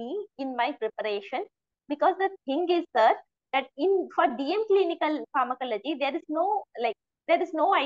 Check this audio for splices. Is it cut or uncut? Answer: uncut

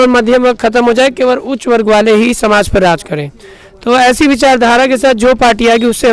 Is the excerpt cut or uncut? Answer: uncut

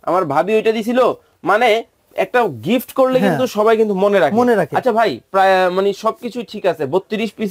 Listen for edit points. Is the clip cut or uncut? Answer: uncut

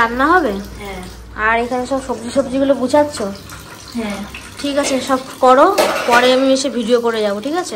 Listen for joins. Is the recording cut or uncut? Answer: uncut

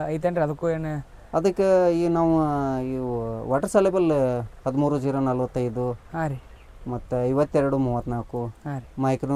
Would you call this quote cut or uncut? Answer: uncut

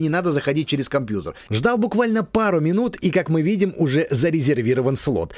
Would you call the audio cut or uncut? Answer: cut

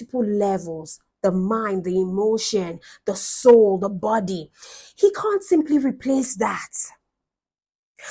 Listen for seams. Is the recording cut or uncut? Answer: uncut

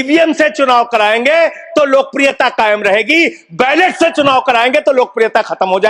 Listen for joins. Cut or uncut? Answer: uncut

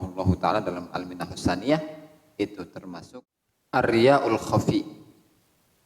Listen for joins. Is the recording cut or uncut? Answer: cut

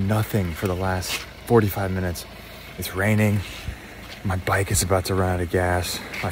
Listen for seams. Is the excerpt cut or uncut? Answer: uncut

